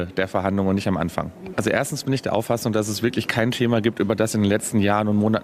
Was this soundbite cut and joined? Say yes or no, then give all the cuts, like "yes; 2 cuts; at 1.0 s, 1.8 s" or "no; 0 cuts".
yes; 1 cut; at 1.4 s